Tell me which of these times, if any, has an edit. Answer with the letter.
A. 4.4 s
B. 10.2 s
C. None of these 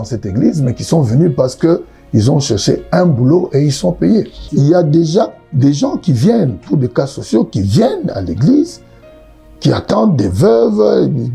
A